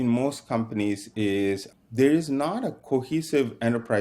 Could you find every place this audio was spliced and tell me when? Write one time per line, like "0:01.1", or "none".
0:01.7